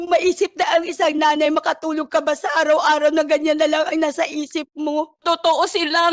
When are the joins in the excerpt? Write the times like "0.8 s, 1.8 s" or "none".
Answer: 5.2 s